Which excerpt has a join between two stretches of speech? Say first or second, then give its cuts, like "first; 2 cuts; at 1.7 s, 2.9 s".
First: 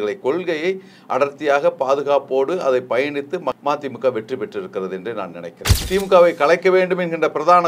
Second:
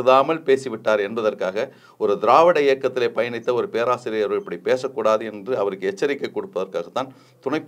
first; 2 cuts; at 3.6 s, 5.8 s